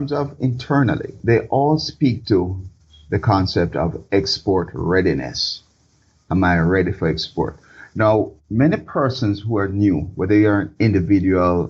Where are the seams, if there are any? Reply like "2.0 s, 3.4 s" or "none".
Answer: 1.2 s